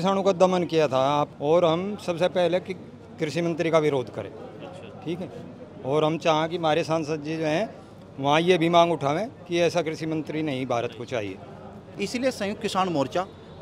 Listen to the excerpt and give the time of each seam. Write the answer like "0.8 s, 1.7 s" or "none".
1.3 s, 11.9 s